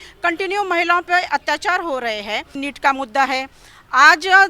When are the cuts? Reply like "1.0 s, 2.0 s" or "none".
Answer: 2.5 s